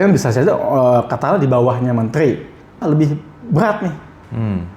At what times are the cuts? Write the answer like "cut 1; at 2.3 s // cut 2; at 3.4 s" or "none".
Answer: cut 1; at 2.8 s